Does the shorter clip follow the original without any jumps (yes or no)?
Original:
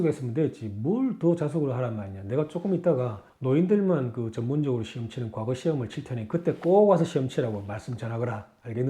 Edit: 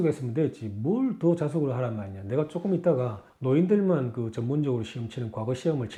yes